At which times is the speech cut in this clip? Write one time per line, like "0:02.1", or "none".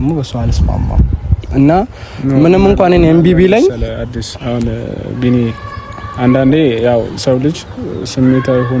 none